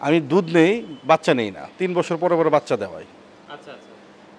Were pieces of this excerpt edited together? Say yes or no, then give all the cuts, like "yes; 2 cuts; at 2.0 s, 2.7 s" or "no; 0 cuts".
no; 0 cuts